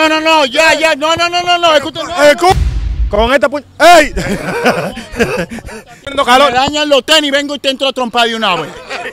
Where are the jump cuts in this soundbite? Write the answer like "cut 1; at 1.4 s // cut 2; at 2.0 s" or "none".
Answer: cut 1; at 2.5 s // cut 2; at 6.0 s